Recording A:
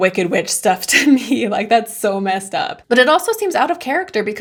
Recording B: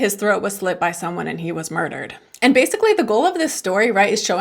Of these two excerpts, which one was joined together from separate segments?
B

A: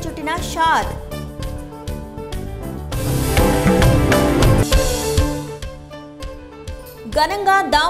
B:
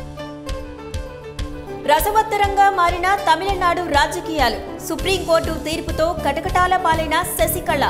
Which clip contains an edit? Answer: B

